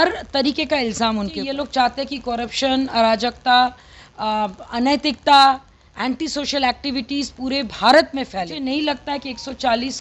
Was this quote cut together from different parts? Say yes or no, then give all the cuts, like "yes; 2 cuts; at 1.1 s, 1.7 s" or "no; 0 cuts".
yes; 2 cuts; at 1.5 s, 8.6 s